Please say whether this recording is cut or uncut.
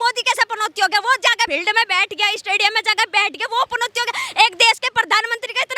cut